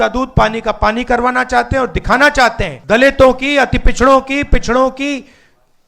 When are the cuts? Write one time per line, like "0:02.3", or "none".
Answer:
0:02.7